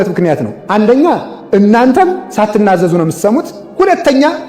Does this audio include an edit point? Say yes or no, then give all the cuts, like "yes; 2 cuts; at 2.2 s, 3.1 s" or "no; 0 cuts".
yes; 2 cuts; at 2.2 s, 3.6 s